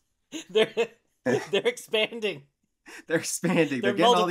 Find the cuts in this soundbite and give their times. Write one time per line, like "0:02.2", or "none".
none